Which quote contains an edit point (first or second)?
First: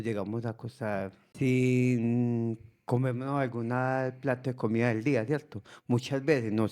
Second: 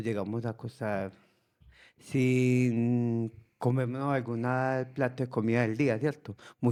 first